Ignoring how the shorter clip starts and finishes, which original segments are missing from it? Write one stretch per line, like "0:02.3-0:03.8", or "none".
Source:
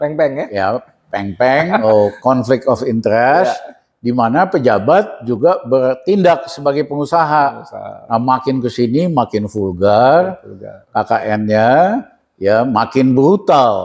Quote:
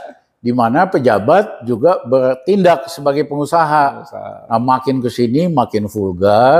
none